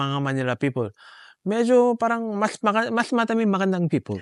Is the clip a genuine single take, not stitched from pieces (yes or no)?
yes